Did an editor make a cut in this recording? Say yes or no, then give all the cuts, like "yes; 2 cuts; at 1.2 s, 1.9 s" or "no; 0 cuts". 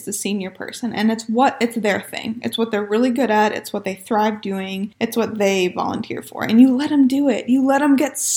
yes; 1 cut; at 4.9 s